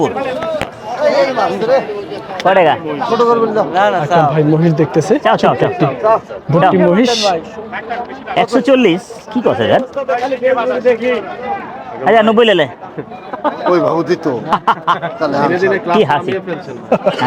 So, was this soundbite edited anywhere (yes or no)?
no